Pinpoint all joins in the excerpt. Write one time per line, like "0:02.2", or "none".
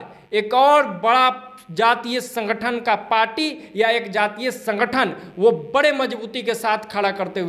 none